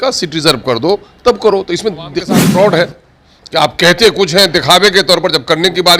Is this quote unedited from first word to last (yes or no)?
no